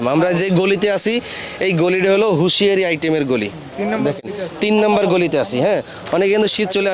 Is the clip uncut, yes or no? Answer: yes